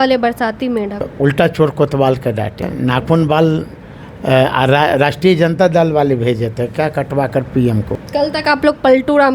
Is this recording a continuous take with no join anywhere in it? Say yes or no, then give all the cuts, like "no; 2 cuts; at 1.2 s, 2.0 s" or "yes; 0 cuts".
no; 3 cuts; at 1.1 s, 2.7 s, 8.0 s